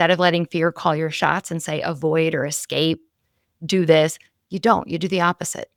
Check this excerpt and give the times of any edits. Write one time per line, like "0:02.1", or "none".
none